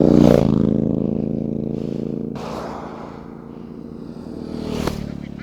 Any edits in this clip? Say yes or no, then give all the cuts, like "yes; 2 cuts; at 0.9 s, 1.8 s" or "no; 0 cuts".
no; 0 cuts